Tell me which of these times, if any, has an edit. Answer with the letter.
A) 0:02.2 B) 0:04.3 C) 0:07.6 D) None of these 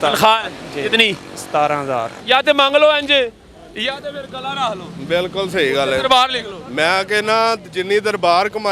A